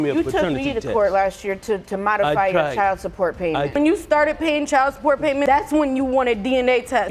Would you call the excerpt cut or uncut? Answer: cut